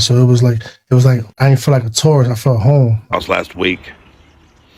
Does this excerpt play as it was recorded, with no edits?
no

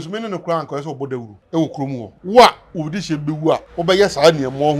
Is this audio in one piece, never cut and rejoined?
no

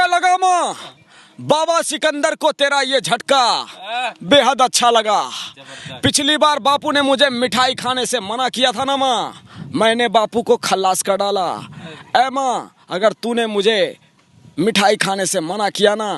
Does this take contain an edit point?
no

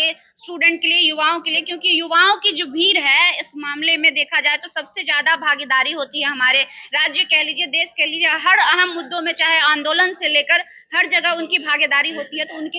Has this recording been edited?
no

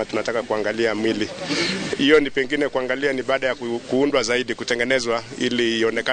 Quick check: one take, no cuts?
yes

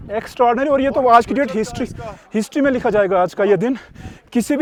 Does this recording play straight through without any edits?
yes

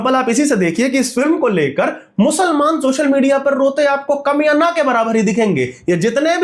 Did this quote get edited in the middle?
no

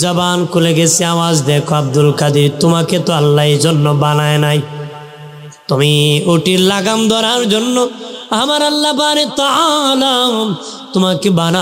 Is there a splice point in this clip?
no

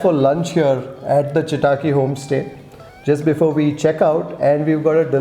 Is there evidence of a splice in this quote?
no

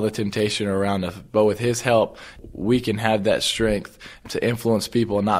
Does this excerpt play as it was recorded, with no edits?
yes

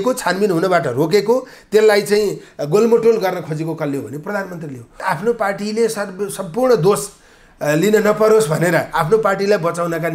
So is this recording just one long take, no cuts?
no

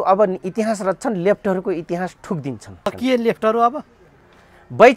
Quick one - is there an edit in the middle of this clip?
yes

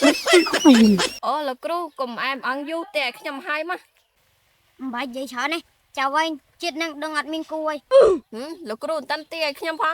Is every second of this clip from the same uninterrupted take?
no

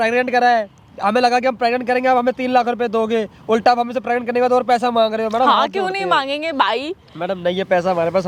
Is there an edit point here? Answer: no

